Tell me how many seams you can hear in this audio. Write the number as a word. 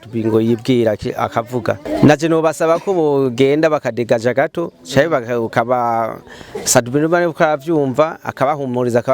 one